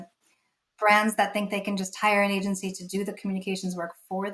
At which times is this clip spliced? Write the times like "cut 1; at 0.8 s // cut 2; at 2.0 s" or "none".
none